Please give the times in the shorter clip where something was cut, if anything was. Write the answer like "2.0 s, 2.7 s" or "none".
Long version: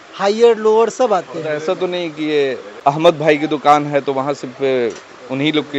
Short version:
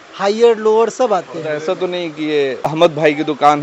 2.7 s